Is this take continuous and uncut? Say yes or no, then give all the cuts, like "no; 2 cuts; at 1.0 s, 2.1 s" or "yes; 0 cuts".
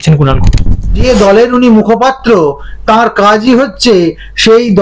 no; 1 cut; at 1.0 s